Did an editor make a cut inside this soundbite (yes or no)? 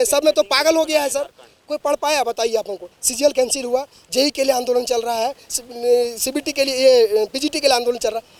no